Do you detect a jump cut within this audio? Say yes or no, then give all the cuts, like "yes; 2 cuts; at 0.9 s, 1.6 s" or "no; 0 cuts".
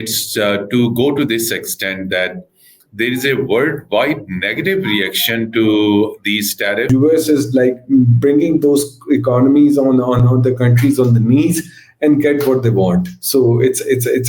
yes; 1 cut; at 6.9 s